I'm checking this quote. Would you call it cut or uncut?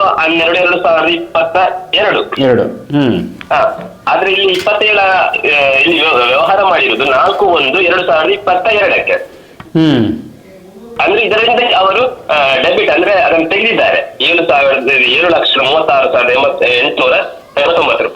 uncut